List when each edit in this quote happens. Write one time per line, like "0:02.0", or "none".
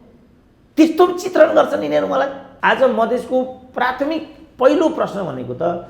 0:02.4